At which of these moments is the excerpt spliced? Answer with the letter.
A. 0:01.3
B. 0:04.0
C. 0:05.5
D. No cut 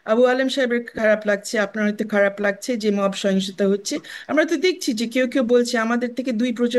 D